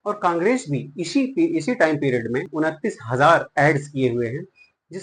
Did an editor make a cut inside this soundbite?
yes; 1 cut; at 2.5 s

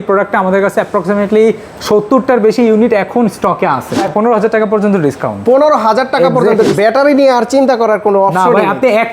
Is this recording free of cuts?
no; 2 cuts; at 3.9 s, 6.7 s

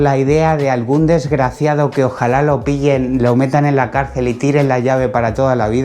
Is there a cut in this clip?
no; 0 cuts

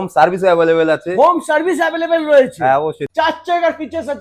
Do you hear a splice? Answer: yes; 1 cut; at 3.0 s

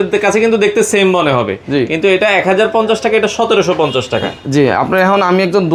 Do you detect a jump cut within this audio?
no; 0 cuts

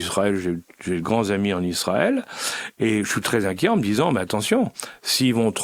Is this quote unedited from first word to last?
yes; 0 cuts

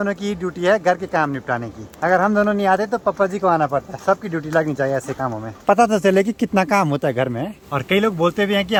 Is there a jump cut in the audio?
no; 0 cuts

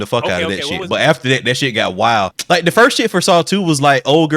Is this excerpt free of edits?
no; 1 cut; at 2.3 s

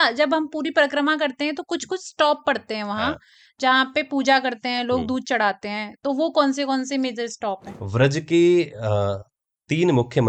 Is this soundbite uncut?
yes; 0 cuts

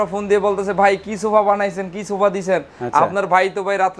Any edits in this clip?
no; 0 cuts

